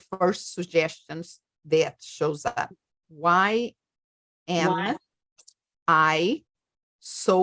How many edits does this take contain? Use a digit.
1